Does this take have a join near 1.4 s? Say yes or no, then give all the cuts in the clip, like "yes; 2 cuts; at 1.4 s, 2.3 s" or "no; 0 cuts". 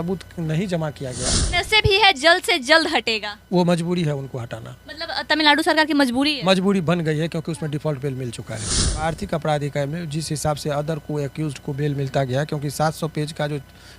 yes; 2 cuts; at 1.4 s, 9.0 s